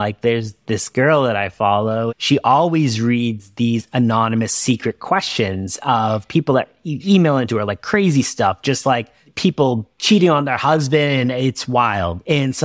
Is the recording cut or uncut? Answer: cut